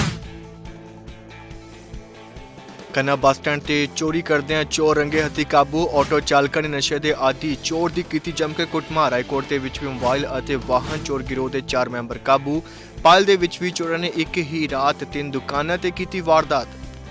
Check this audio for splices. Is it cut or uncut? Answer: uncut